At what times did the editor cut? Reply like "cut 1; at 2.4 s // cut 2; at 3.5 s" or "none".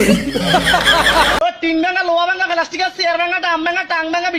cut 1; at 1.4 s